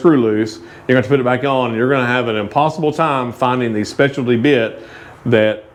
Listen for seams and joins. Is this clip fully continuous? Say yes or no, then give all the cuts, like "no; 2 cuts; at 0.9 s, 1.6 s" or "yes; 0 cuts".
yes; 0 cuts